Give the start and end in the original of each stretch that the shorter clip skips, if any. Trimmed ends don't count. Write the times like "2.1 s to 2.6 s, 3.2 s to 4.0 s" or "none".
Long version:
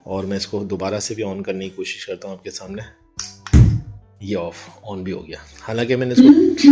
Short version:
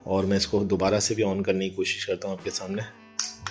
none